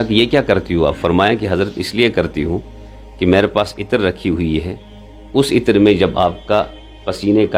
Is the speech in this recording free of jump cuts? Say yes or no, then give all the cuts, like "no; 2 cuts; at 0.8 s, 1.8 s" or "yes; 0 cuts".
yes; 0 cuts